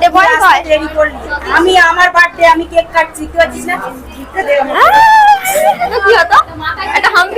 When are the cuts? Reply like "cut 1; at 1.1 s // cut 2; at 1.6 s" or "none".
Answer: cut 1; at 5.9 s